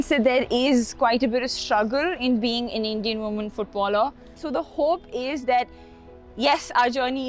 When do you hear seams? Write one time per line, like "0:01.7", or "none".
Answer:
0:04.4